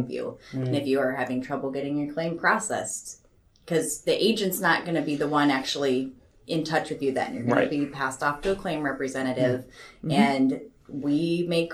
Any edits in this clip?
no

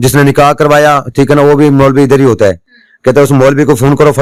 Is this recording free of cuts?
yes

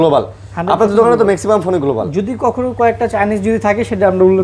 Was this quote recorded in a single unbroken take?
yes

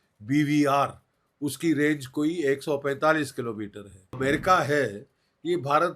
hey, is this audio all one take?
no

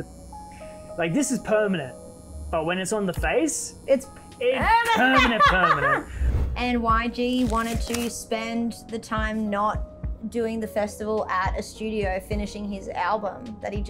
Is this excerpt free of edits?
no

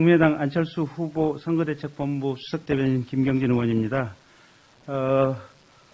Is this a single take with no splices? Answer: yes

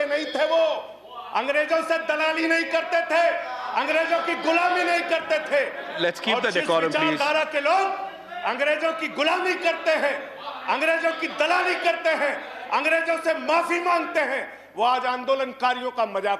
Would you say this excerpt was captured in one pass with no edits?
yes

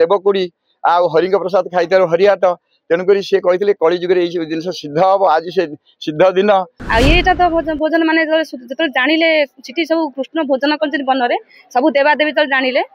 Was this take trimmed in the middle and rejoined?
yes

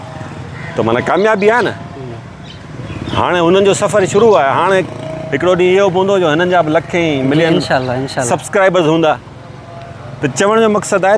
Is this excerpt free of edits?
yes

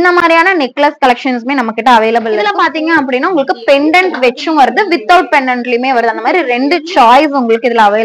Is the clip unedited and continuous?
no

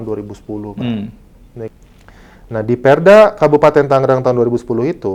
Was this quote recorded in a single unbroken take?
no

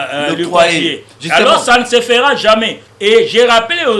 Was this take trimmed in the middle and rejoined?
yes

